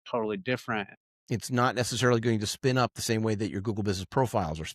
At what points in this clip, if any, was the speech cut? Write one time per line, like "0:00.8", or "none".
0:00.9